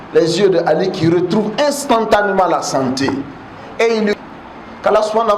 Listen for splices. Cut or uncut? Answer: cut